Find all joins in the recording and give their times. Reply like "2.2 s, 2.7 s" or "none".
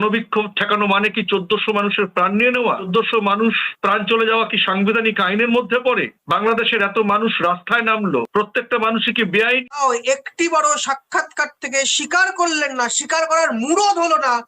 2.9 s, 9.8 s